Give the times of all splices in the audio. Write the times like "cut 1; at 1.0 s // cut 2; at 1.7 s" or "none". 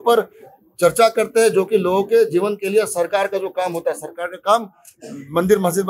none